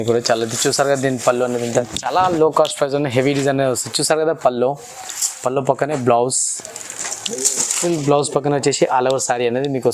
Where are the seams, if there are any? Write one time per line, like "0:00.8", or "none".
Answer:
0:01.6

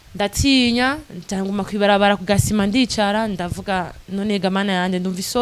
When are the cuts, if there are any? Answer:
none

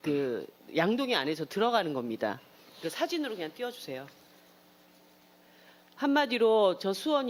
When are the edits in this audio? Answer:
none

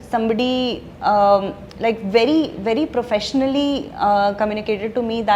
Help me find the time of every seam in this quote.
none

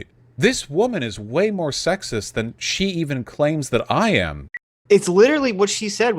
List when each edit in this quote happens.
0:04.4

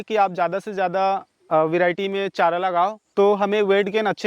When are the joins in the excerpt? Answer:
0:03.0

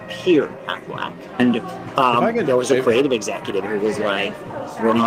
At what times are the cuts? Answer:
none

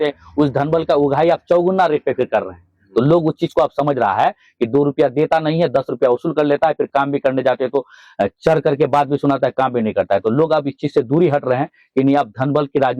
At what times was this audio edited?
none

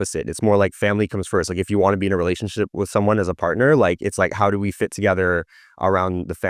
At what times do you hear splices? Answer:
none

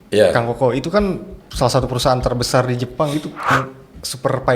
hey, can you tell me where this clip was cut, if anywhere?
0:03.5

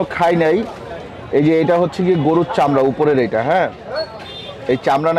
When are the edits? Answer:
none

